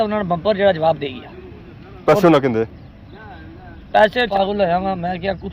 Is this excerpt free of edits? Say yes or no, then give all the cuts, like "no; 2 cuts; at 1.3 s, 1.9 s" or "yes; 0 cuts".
no; 1 cut; at 4.3 s